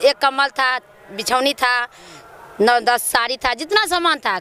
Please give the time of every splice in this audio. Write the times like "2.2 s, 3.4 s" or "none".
none